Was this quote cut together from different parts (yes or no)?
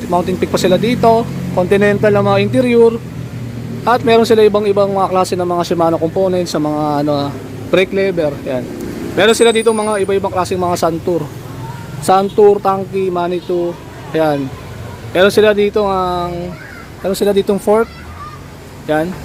no